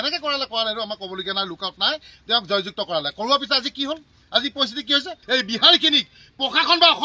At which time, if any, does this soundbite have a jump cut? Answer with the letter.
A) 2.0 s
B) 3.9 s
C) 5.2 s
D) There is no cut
C